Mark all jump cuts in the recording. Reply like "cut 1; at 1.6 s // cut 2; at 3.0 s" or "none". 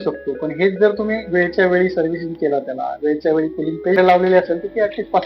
cut 1; at 4.0 s